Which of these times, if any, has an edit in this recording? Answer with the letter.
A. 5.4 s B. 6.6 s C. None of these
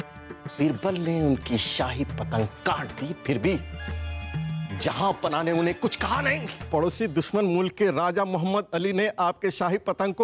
B